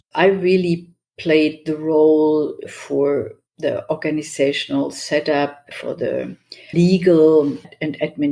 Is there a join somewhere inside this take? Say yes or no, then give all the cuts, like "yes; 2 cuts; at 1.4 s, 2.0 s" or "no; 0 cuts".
no; 0 cuts